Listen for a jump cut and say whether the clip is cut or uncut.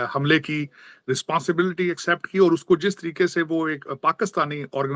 uncut